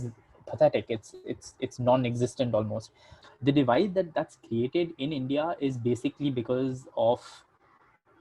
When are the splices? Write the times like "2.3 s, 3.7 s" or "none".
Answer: 3.1 s